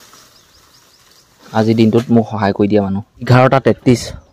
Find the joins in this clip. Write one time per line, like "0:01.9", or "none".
0:03.3